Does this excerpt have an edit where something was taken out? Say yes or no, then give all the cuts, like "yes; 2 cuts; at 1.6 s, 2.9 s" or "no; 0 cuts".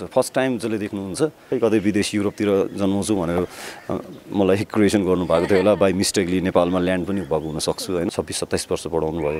yes; 2 cuts; at 1.4 s, 8.1 s